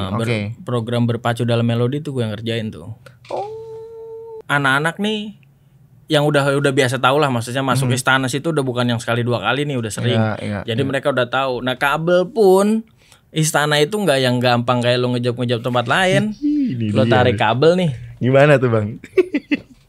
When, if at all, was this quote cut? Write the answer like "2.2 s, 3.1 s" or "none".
4.3 s